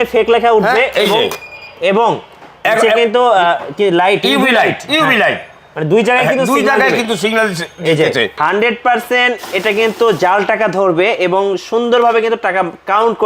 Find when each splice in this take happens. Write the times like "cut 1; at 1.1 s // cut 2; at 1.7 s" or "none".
cut 1; at 8.4 s